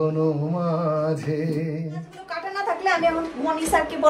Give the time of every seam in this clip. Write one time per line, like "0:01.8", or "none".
0:02.4